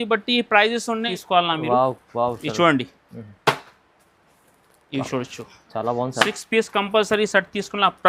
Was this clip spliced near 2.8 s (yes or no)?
no